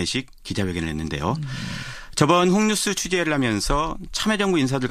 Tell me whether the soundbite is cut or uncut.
cut